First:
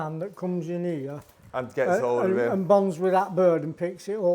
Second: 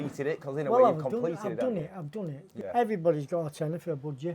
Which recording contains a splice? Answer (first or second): second